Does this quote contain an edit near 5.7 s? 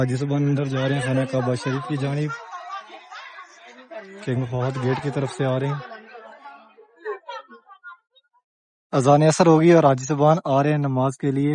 no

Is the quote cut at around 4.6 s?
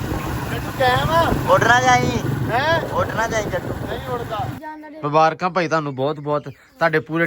yes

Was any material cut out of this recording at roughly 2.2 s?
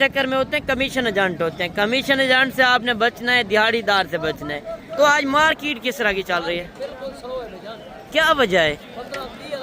no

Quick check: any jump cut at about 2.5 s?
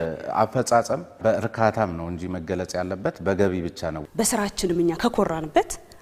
no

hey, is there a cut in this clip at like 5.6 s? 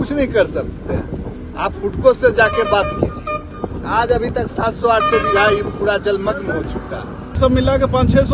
no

